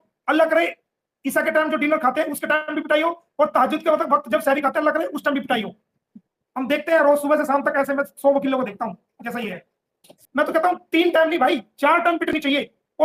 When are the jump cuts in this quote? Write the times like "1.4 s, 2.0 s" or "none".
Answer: 6.0 s, 10.1 s